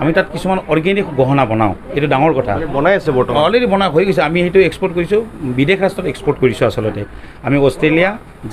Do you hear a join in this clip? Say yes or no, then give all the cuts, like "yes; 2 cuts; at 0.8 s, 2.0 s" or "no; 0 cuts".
no; 0 cuts